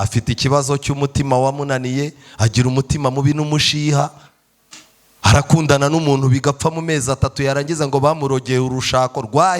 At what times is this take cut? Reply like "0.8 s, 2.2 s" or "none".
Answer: none